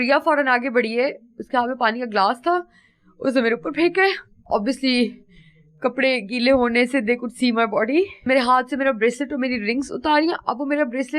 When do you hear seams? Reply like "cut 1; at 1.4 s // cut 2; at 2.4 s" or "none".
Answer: cut 1; at 4.4 s // cut 2; at 8.3 s